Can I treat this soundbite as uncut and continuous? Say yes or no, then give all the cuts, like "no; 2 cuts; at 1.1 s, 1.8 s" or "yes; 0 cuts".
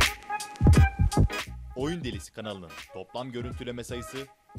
no; 1 cut; at 1.6 s